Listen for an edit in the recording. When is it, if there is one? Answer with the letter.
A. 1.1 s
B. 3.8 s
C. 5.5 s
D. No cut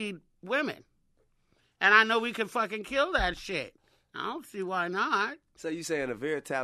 C